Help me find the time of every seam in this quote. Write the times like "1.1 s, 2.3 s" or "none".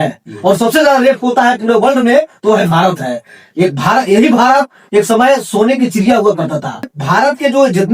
7.0 s